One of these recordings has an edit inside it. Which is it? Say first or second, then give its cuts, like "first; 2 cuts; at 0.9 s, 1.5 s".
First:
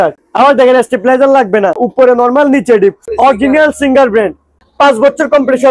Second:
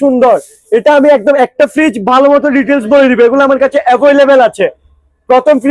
first; 3 cuts; at 1.8 s, 3.0 s, 4.6 s